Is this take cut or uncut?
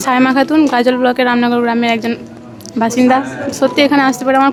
uncut